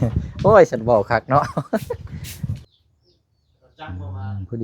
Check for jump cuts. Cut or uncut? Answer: cut